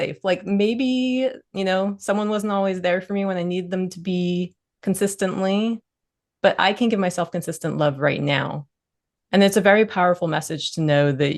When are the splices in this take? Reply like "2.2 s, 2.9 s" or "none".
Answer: none